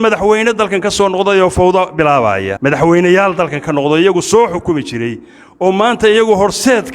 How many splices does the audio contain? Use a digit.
1